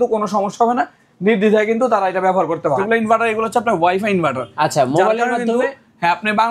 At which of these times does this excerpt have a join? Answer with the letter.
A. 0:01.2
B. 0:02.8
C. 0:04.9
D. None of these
B